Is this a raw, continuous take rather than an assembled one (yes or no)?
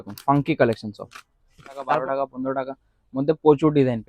no